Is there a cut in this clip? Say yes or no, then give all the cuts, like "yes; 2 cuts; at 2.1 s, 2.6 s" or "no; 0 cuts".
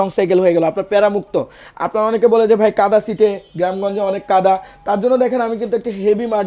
no; 0 cuts